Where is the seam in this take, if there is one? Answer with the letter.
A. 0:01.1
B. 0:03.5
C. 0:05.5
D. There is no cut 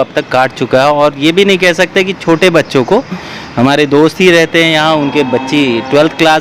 D